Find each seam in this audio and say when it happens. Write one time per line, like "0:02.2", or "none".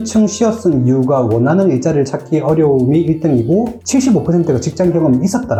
none